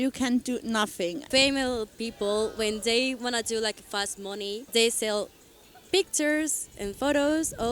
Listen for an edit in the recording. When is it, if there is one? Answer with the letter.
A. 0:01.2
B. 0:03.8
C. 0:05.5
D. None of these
A